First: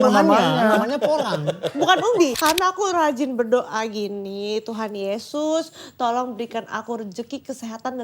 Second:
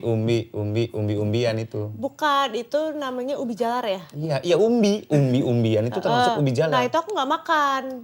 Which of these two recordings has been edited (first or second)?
first